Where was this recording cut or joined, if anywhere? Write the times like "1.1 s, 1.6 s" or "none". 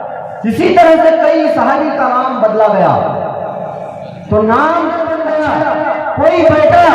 5.1 s